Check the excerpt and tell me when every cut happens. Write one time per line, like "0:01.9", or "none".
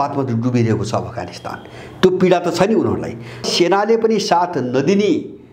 0:03.5

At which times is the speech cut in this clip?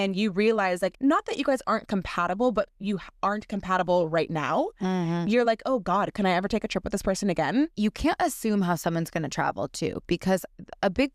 0:00.9
0:07.7

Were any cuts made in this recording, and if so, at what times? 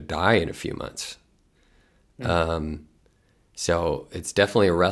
none

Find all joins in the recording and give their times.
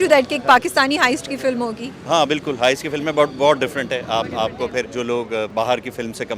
0:05.2

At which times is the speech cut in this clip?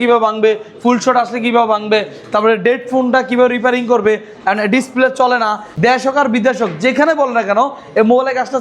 0:05.7

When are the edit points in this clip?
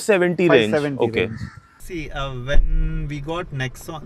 0:01.9

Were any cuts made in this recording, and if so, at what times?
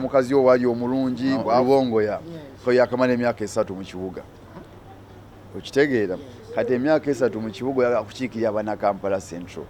0:01.6

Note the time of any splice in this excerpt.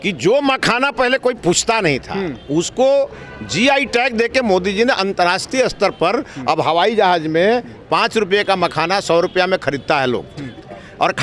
none

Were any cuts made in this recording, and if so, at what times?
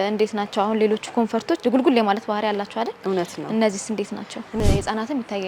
0:01.6
0:04.6

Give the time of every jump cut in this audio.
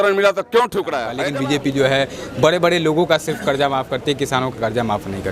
0:01.3

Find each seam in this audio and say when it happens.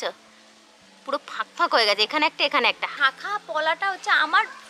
0:02.8

